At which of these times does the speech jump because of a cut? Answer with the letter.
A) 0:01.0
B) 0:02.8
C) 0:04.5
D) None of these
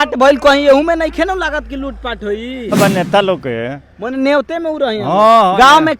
B